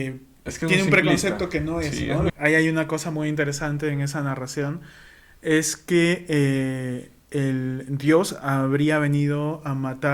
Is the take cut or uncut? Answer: cut